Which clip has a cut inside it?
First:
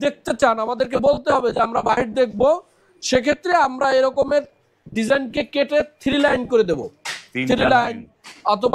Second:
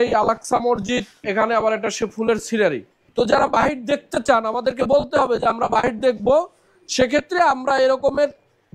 second; 2 cuts; at 1.2 s, 3.0 s

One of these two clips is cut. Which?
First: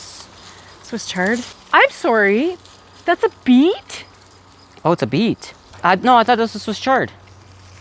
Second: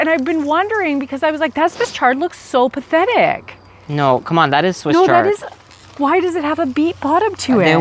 first; 2 cuts; at 1.5 s, 5.8 s

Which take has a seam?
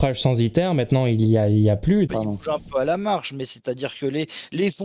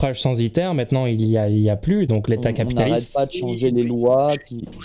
first; 1 cut; at 2.1 s

